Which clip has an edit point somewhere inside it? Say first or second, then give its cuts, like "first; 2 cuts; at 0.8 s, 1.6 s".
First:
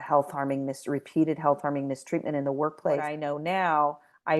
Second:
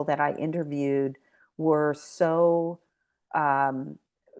first; 1 cut; at 3.1 s